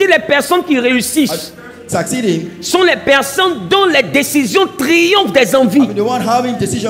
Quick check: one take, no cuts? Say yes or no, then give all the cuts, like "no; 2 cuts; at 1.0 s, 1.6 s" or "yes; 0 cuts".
yes; 0 cuts